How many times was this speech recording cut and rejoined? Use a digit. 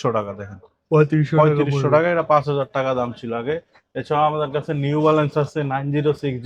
0